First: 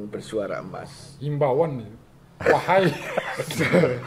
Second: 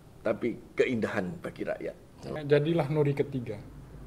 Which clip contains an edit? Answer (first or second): second